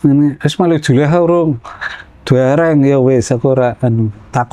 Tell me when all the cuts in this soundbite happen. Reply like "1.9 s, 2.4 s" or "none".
none